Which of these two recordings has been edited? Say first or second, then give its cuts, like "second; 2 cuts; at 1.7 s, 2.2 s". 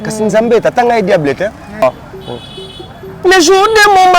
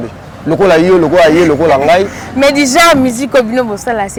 first; 1 cut; at 1.8 s